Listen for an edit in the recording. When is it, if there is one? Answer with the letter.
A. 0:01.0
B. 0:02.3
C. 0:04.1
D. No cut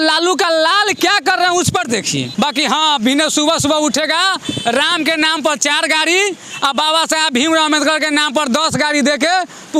B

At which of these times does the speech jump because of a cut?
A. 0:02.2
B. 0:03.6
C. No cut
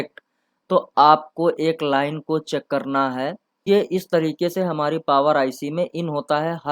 B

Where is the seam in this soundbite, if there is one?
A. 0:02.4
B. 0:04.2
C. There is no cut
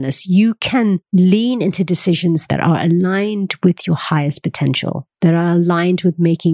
A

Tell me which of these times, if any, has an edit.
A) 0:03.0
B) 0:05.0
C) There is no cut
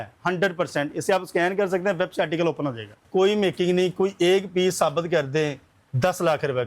A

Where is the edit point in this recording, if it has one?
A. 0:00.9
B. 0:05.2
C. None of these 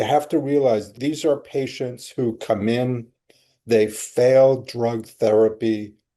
A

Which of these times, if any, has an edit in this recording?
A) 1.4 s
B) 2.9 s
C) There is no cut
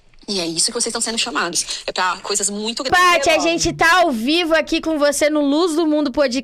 B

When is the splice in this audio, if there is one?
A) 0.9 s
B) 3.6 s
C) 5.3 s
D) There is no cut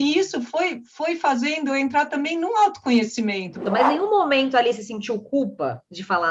B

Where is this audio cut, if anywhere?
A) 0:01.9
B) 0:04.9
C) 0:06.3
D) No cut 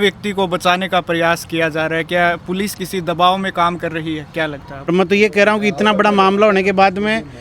B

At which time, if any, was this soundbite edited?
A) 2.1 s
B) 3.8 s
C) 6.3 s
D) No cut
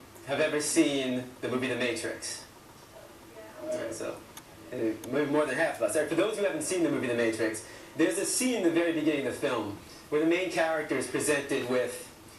C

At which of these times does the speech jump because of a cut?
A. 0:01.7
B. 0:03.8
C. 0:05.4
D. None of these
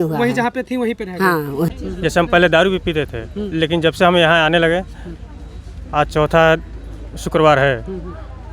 A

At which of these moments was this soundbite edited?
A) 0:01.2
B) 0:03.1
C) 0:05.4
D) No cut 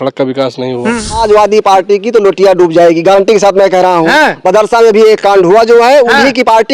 A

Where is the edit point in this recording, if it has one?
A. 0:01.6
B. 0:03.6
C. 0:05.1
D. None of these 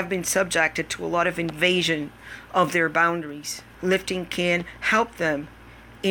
B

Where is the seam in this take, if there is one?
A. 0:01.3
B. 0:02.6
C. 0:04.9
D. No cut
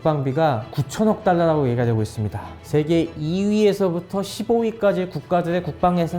B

